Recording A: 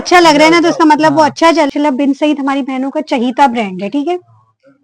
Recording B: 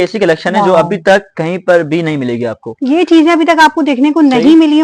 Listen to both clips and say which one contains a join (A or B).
A